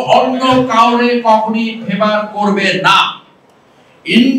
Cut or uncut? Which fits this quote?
uncut